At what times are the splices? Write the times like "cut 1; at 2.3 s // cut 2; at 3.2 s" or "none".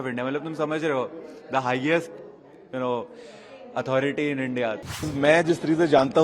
cut 1; at 5.1 s